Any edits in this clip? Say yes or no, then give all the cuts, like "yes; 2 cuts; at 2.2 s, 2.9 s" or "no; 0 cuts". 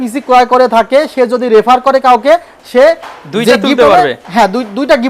no; 0 cuts